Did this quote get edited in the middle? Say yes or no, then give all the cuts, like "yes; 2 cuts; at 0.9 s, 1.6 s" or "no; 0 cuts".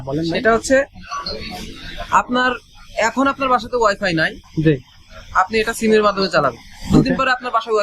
no; 0 cuts